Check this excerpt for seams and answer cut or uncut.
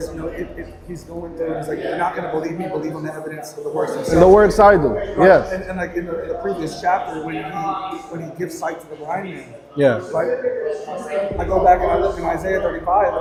uncut